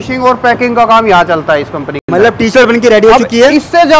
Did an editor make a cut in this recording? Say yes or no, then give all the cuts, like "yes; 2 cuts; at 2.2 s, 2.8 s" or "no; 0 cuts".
no; 0 cuts